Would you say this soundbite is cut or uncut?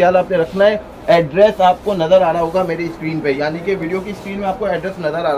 uncut